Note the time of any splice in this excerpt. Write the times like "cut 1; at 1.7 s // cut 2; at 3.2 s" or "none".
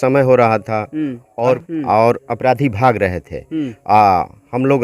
cut 1; at 1.6 s